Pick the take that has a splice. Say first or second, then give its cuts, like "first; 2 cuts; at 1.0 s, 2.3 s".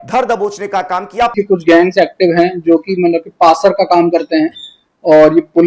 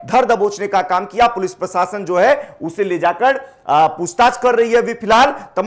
first; 1 cut; at 1.3 s